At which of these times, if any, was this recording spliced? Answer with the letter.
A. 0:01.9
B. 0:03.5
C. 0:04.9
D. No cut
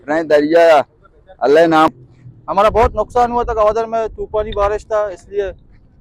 A